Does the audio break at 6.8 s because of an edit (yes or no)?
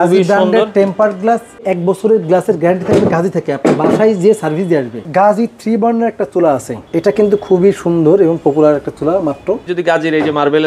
yes